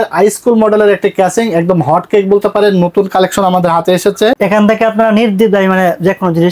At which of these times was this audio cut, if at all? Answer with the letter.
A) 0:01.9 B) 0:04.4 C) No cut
B